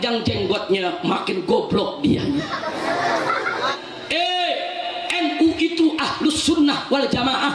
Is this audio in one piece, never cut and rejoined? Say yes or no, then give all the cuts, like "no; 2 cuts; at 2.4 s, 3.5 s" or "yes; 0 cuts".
no; 1 cut; at 3.7 s